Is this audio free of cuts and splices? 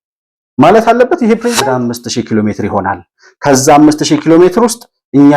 no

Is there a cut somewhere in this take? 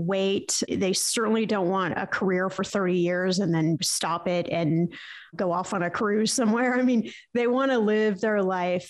no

